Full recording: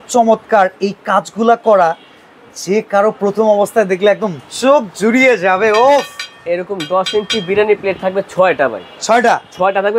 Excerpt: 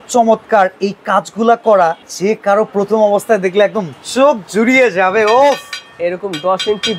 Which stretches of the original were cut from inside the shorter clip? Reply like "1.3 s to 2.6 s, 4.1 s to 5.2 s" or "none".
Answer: 2.1 s to 2.5 s